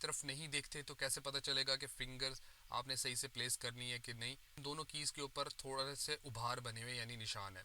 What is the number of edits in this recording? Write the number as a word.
one